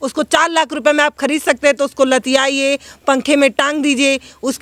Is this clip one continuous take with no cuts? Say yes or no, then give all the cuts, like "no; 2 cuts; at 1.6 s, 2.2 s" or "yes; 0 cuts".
yes; 0 cuts